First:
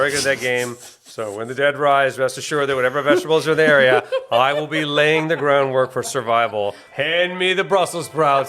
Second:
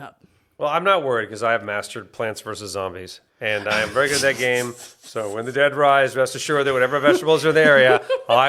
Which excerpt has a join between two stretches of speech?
first; 1 cut; at 6.9 s

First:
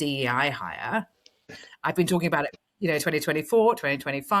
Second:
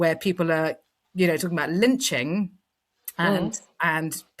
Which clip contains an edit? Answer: first; 1 cut; at 1.4 s

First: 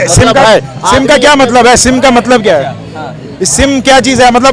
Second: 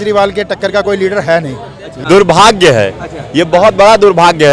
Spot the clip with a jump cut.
second; 1 cut; at 2.0 s

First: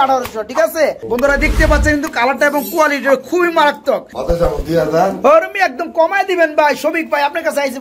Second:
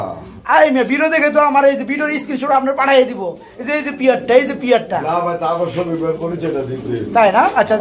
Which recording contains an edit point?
first; 2 cuts; at 1.0 s, 4.1 s

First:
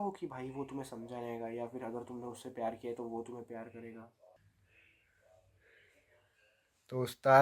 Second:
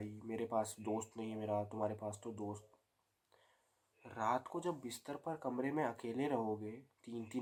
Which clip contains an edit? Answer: first; 1 cut; at 4.4 s

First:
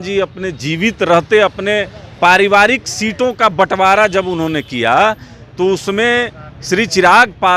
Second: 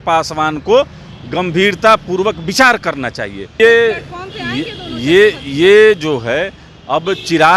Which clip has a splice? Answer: second; 1 cut; at 3.6 s

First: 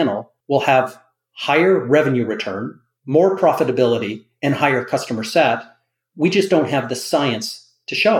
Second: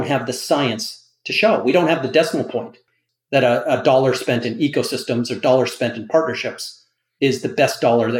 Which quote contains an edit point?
second; 1 cut; at 2.8 s

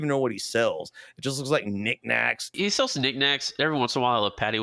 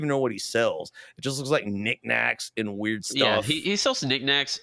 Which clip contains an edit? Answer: first; 1 cut; at 2.5 s

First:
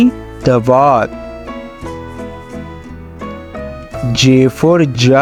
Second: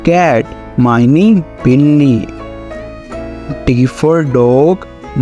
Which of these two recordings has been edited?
second; 2 cuts; at 2.3 s, 3.6 s

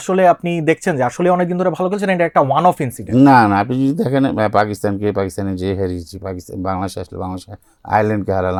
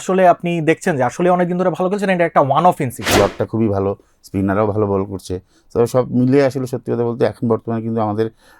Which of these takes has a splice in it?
second; 1 cut; at 2.9 s

